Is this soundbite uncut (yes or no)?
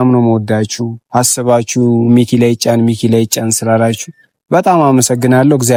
yes